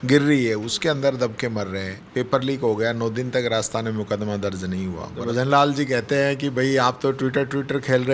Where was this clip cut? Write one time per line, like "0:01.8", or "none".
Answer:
0:02.0
0:05.1